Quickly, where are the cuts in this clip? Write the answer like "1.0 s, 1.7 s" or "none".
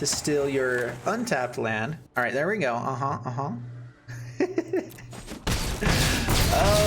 2.0 s